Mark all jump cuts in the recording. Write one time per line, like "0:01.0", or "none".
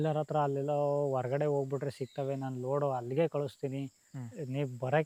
none